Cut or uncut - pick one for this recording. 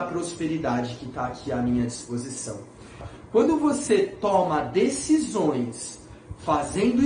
cut